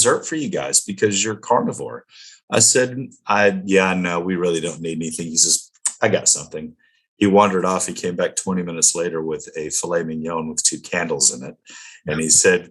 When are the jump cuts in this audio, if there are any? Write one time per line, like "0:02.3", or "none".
none